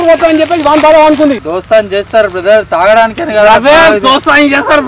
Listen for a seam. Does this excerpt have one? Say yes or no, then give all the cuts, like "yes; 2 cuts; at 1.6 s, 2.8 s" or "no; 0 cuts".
yes; 1 cut; at 1.4 s